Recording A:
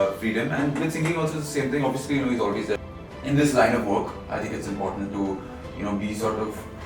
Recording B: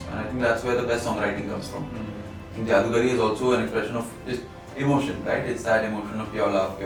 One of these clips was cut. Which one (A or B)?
A